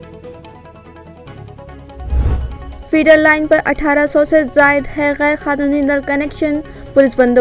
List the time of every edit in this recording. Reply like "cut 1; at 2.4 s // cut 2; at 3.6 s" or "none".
cut 1; at 2.5 s